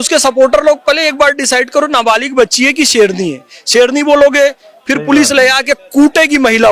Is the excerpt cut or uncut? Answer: uncut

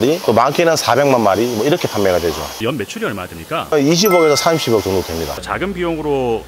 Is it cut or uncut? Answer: cut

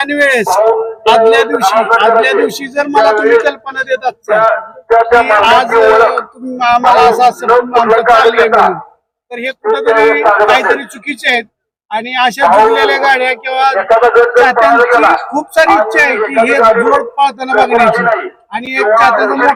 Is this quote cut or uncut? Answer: uncut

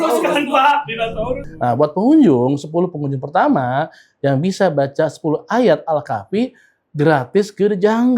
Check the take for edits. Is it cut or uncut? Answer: cut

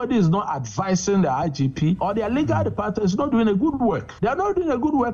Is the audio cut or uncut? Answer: cut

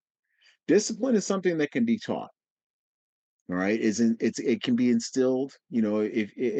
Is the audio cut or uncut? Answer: uncut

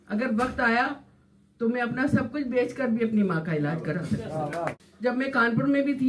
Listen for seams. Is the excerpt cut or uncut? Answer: cut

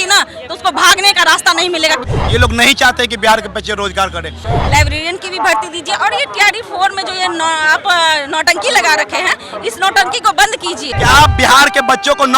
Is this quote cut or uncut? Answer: cut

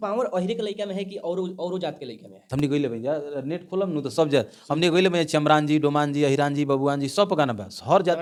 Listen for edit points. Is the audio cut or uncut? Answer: uncut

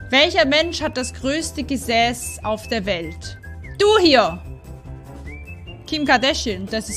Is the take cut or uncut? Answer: uncut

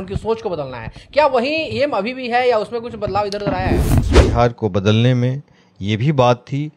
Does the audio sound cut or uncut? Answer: cut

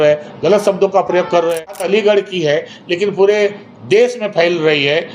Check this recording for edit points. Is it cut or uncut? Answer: cut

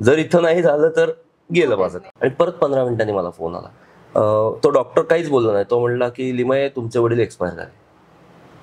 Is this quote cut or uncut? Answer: cut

